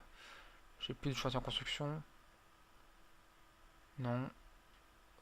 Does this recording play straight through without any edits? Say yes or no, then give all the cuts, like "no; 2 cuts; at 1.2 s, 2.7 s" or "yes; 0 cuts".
yes; 0 cuts